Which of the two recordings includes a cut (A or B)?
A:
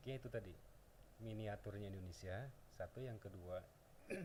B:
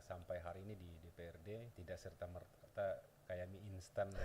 B